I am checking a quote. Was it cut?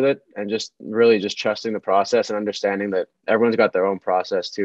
no; 0 cuts

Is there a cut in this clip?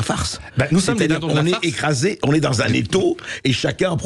no; 0 cuts

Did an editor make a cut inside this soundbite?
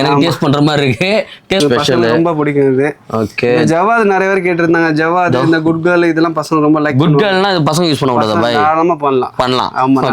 yes; 1 cut; at 1.6 s

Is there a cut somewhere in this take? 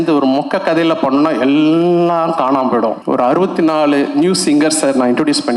yes; 1 cut; at 3.0 s

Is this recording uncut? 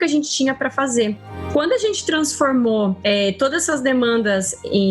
no; 1 cut; at 1.2 s

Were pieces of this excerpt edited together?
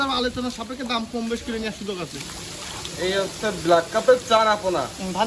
yes; 1 cut; at 2.1 s

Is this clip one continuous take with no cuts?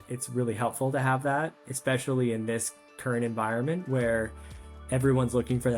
yes; 0 cuts

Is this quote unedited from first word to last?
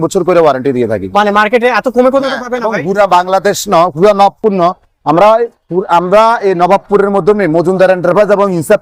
yes; 0 cuts

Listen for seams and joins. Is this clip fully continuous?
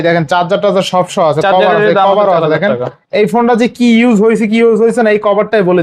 yes; 0 cuts

